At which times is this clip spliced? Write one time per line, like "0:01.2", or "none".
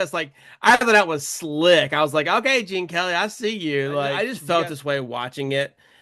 0:04.2